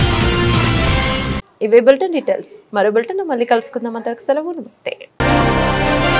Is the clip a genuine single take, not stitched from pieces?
yes; 0 cuts

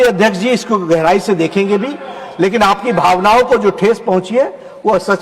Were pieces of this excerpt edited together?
no; 0 cuts

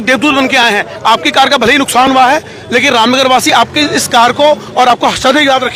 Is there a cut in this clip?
no; 0 cuts

